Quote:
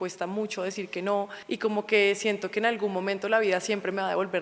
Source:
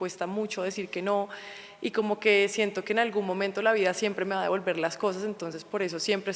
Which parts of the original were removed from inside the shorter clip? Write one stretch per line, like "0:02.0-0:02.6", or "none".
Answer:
0:01.4-0:01.7